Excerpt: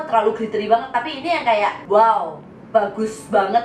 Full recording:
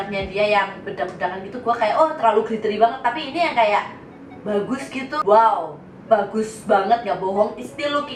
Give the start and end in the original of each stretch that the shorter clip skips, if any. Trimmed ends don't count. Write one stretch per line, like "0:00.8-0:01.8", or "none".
0:03.9-0:05.2